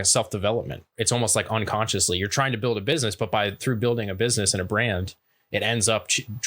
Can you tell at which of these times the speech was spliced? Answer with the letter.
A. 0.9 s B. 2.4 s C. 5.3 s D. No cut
A